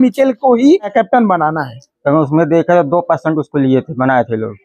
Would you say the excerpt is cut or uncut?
cut